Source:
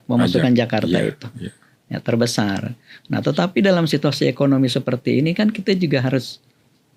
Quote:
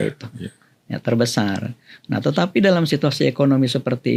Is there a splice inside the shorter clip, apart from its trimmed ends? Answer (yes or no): no